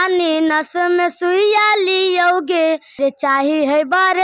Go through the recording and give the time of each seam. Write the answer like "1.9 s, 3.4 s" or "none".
3.0 s

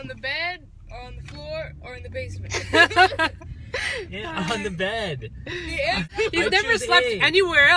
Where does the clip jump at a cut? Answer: 6.1 s

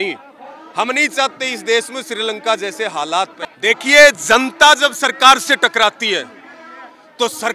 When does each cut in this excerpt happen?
3.4 s

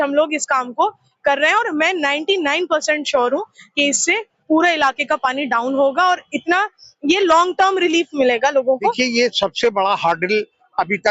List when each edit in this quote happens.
8.8 s

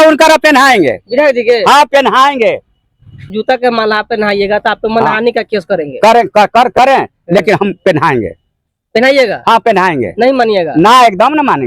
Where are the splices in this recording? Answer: 3.3 s

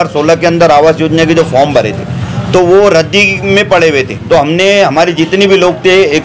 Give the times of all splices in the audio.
4.1 s

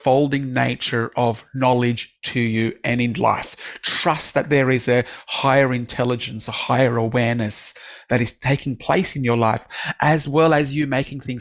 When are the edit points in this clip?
none

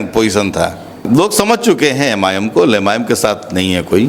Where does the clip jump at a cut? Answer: 1.0 s

